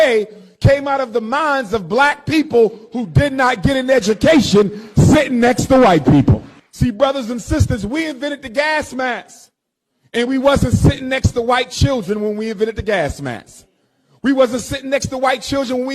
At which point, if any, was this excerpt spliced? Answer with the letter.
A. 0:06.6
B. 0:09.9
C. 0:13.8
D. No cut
A